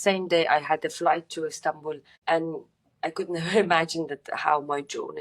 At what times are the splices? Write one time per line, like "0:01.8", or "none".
0:02.1